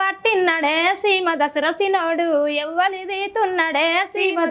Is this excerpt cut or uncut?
uncut